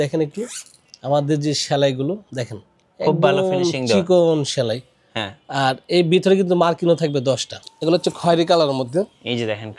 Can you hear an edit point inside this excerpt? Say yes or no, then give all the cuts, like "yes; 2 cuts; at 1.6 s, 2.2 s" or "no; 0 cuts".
yes; 1 cut; at 7.6 s